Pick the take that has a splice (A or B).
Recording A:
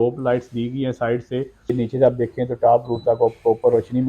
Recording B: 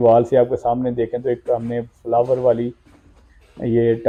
A